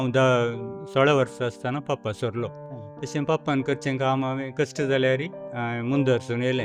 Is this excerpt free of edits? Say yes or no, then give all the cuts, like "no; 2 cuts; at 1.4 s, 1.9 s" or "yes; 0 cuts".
yes; 0 cuts